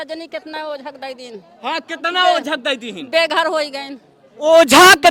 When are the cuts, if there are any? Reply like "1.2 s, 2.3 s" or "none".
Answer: none

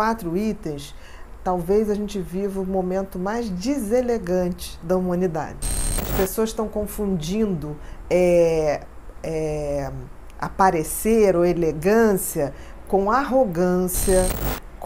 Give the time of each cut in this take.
6.1 s

